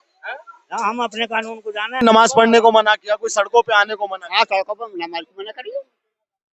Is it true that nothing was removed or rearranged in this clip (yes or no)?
no